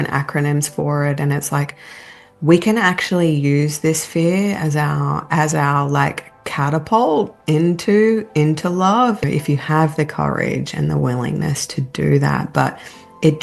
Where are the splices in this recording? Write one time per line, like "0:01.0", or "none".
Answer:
0:09.2